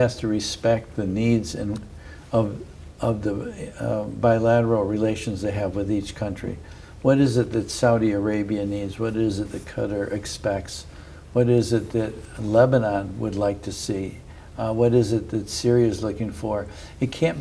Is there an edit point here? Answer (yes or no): no